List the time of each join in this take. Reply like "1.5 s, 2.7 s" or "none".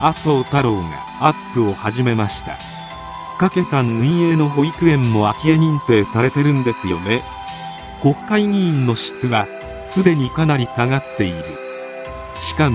none